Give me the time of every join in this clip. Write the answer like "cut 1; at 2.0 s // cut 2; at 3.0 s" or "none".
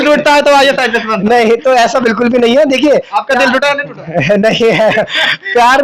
none

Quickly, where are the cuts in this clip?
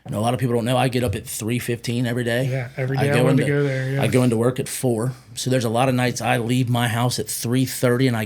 cut 1; at 5.3 s

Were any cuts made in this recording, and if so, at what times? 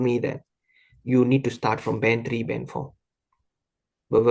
none

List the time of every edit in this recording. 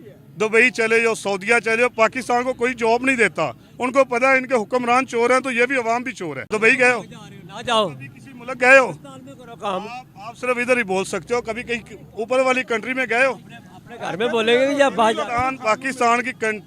cut 1; at 6.5 s

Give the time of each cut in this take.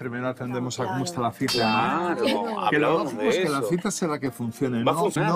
none

